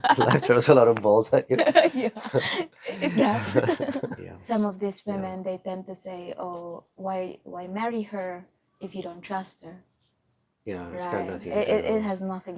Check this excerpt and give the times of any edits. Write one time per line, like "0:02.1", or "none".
0:04.3